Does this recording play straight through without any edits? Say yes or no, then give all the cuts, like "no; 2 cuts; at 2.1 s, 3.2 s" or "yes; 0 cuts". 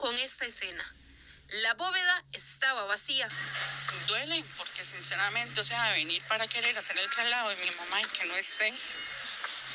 yes; 0 cuts